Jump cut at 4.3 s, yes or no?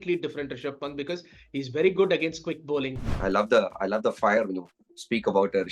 no